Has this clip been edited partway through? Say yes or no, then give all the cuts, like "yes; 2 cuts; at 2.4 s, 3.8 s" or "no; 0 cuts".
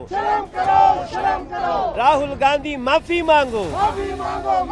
yes; 1 cut; at 2.0 s